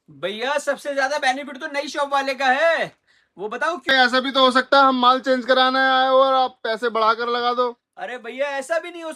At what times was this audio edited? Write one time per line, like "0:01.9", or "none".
0:03.8